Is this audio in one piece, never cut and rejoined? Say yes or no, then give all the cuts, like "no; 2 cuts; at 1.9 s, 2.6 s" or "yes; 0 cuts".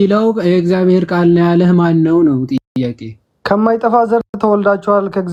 yes; 0 cuts